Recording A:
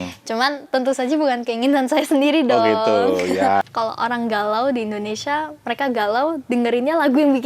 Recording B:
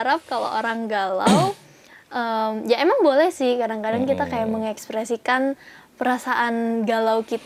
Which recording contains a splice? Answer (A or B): A